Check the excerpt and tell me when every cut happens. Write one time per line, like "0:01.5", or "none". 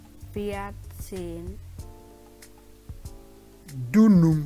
0:01.6
0:03.6